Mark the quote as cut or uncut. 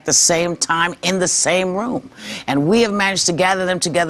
cut